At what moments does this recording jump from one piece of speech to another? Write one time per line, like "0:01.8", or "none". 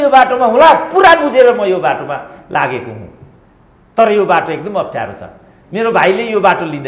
none